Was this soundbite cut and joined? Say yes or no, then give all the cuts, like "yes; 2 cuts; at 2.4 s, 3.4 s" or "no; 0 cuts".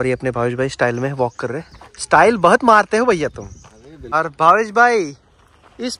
yes; 1 cut; at 4.1 s